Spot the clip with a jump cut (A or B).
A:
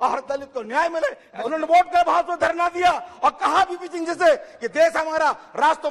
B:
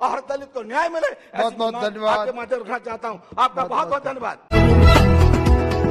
A